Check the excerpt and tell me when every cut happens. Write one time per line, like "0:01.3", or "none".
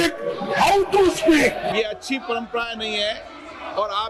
0:01.7